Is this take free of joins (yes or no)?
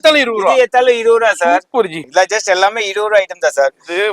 no